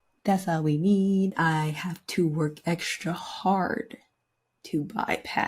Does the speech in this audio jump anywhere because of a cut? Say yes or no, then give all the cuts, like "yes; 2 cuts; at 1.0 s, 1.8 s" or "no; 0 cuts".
yes; 1 cut; at 1.3 s